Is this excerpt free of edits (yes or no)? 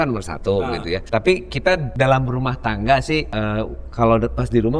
no